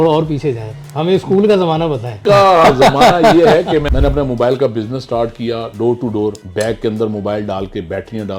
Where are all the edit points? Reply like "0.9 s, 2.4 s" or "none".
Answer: 2.2 s, 3.9 s, 6.4 s